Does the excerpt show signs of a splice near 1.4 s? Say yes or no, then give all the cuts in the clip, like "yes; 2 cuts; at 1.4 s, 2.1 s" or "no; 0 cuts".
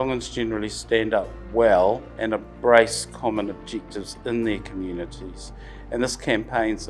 yes; 2 cuts; at 1.4 s, 2.1 s